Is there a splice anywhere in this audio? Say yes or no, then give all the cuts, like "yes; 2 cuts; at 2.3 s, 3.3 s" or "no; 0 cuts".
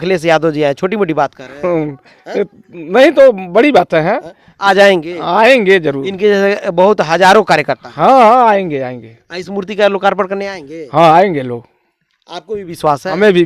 no; 0 cuts